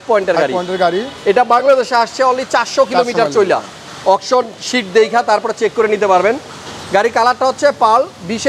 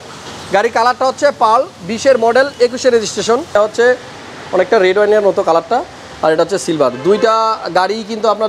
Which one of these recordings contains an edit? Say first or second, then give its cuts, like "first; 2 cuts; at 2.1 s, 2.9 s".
second; 1 cut; at 3.6 s